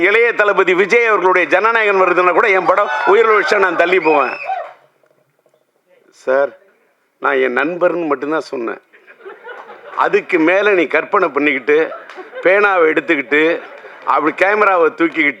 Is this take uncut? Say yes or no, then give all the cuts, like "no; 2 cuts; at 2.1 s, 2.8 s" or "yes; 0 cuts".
yes; 0 cuts